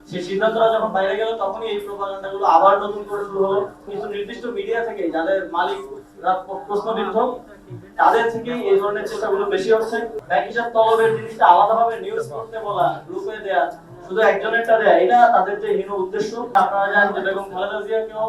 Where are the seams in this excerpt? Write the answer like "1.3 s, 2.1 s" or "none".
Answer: 4.0 s, 10.2 s, 16.5 s